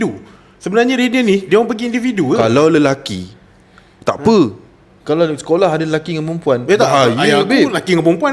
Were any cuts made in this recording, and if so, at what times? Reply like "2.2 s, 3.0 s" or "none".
none